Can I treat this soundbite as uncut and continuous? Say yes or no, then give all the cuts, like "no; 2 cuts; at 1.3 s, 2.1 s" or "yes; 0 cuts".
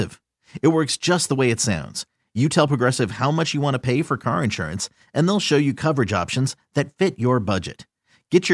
yes; 0 cuts